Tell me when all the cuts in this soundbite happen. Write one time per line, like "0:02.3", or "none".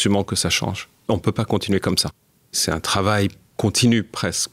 0:00.9
0:02.6
0:03.4